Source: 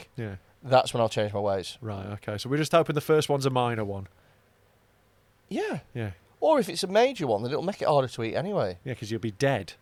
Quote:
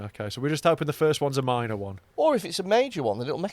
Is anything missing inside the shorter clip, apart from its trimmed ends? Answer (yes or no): yes